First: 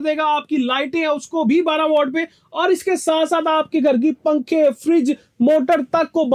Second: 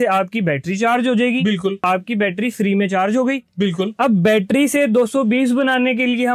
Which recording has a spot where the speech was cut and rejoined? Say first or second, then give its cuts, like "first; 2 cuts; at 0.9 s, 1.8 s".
second; 1 cut; at 1.8 s